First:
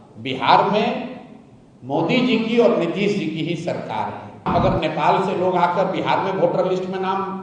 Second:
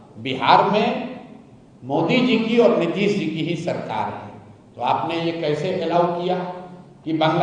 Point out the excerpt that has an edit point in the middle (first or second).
first